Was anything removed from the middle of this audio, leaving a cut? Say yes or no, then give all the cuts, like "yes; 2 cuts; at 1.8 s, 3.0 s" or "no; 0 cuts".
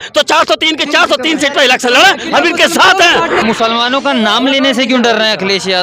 yes; 1 cut; at 3.4 s